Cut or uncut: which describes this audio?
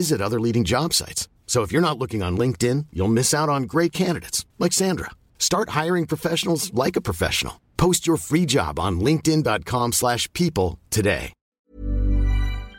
cut